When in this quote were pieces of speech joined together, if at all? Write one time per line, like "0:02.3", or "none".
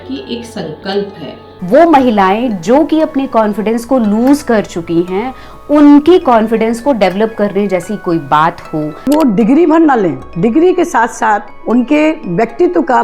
0:01.5
0:09.1